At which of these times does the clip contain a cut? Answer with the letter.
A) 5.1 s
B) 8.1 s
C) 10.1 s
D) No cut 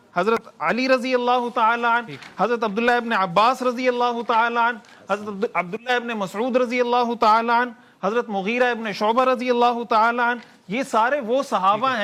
D